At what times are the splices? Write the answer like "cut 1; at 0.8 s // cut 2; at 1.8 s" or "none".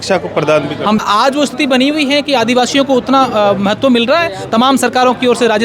cut 1; at 1.0 s